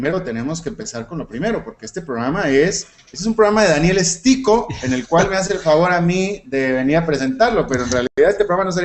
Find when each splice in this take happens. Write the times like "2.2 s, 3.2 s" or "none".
2.7 s

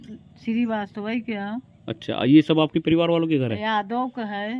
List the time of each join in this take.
none

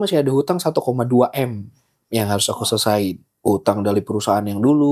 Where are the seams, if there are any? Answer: 3.3 s

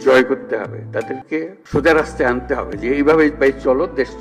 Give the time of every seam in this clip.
1.6 s

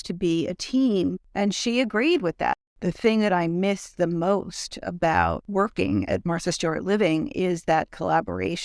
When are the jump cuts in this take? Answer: 1.2 s, 2.6 s, 5.4 s

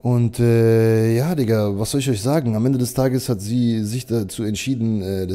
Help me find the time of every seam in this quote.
none

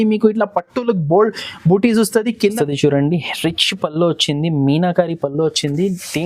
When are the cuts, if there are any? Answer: 2.5 s

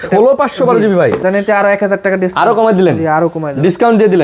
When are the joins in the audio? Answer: 1.2 s

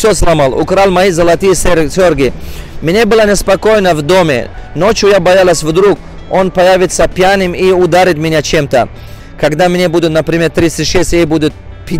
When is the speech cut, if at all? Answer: 9.2 s

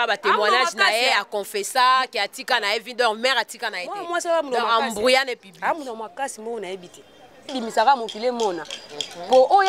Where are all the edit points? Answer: 7.6 s

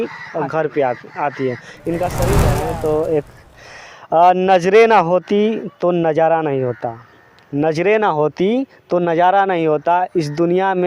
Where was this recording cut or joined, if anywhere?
2.6 s

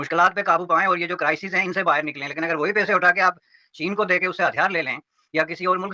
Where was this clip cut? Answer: none

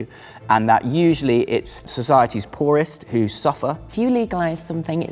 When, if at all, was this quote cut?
1.8 s, 3.9 s

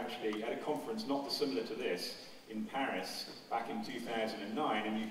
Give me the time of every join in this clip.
2.7 s

